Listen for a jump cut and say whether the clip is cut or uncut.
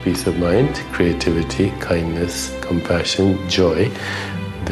uncut